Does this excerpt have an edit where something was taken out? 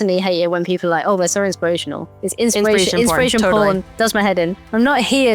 no; 0 cuts

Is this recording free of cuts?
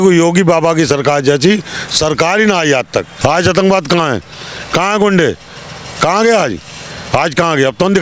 no; 1 cut; at 3.1 s

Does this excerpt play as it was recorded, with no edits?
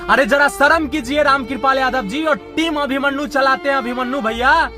yes; 0 cuts

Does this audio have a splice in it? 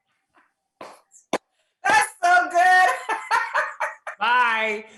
no; 0 cuts

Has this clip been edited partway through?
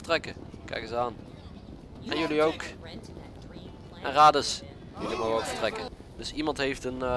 yes; 1 cut; at 5.9 s

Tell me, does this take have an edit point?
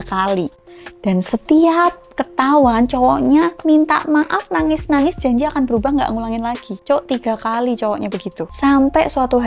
yes; 1 cut; at 8.4 s

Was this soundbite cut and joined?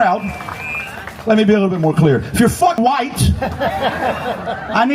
yes; 1 cut; at 2.8 s

